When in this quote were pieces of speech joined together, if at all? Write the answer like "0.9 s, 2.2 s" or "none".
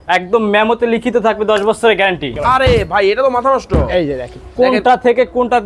2.3 s